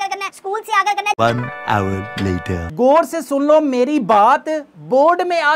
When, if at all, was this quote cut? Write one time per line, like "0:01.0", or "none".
0:02.7

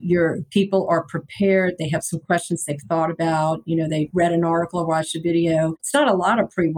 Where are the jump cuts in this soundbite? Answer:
0:04.1
0:05.8

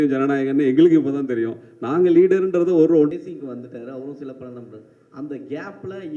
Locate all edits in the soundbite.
0:03.1

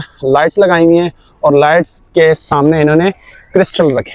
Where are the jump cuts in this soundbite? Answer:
none

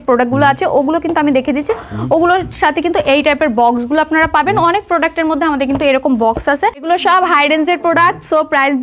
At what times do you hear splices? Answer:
0:06.8

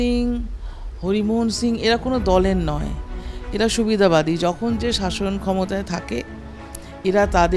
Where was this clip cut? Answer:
none

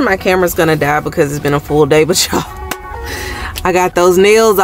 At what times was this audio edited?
none

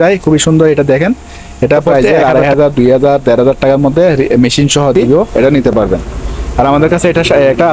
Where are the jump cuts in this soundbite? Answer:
0:01.9
0:05.3

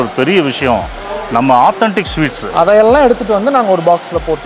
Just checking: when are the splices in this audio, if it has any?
0:02.4

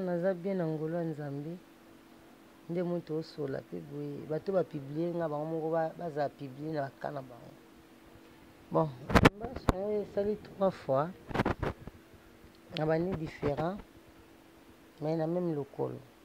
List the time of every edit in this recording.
0:08.6

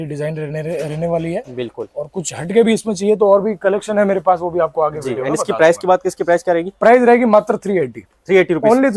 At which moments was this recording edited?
none

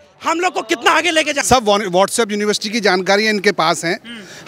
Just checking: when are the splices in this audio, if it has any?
0:01.4

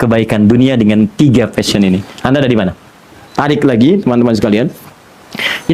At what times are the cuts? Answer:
0:03.2

